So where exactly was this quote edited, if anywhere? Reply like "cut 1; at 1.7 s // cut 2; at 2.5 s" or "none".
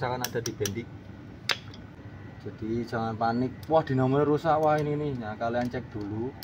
cut 1; at 1.9 s